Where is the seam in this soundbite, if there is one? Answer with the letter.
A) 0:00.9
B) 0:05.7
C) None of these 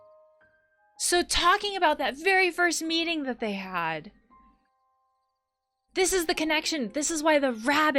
A